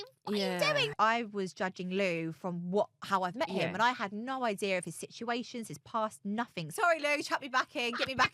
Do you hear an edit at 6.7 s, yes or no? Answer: yes